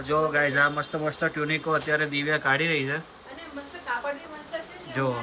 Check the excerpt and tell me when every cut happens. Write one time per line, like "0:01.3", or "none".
none